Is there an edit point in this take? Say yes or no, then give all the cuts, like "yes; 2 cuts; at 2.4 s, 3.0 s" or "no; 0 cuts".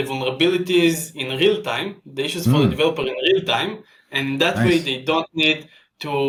no; 0 cuts